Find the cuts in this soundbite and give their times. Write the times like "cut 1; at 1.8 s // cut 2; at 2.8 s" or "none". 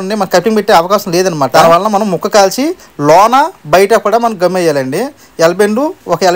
none